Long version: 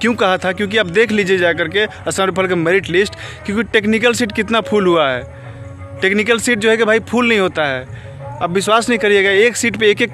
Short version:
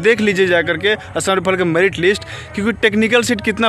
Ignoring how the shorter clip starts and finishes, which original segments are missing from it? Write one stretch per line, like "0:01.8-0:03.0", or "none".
none